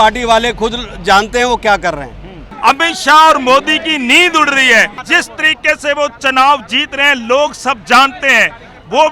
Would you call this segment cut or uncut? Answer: cut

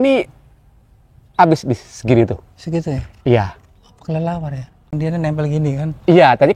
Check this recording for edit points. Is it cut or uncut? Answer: cut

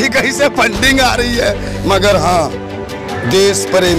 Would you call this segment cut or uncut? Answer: uncut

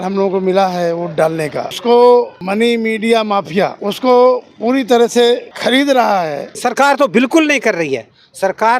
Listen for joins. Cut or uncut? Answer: cut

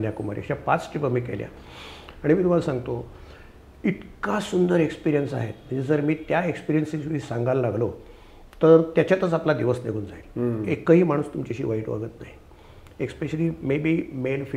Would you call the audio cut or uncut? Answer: uncut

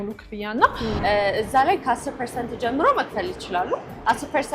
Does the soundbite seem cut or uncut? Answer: cut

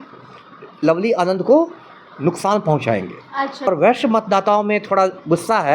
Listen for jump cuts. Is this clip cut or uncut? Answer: cut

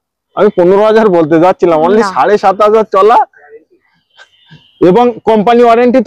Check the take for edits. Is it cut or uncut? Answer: uncut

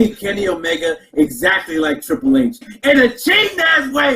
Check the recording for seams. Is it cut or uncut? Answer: cut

